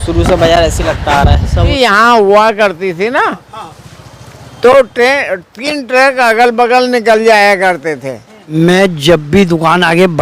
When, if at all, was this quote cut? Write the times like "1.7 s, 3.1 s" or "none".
1.7 s, 8.5 s